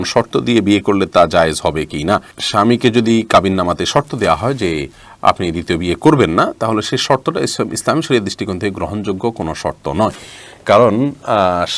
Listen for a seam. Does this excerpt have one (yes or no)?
no